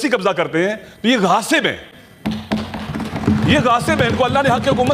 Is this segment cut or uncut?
uncut